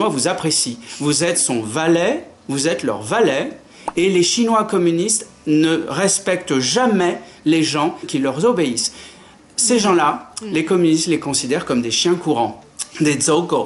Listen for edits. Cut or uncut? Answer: uncut